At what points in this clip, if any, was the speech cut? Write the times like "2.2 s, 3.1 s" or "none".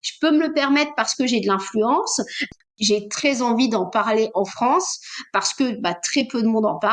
2.7 s